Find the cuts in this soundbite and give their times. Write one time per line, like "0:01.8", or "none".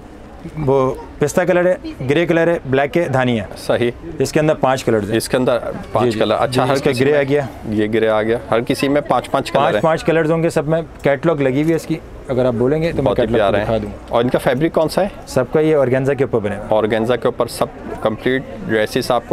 none